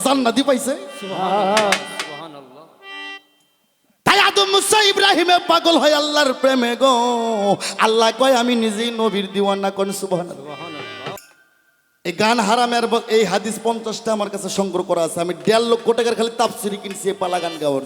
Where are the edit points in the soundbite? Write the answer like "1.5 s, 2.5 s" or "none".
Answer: 11.2 s

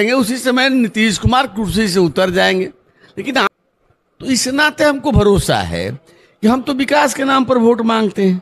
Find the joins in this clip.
3.5 s

